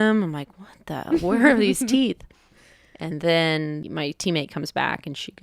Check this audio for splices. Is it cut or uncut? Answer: cut